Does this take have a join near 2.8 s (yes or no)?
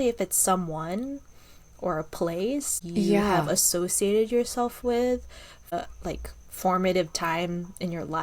yes